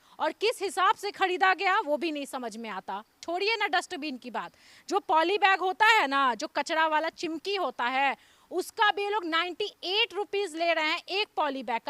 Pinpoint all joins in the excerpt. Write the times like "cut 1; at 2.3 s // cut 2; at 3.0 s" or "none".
cut 1; at 3.2 s